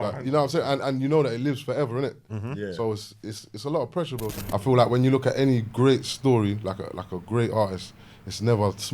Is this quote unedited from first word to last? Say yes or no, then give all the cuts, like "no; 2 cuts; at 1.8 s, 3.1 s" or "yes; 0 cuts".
no; 1 cut; at 4.5 s